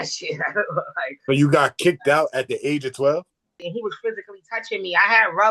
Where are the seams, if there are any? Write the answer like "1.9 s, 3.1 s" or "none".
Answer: 3.6 s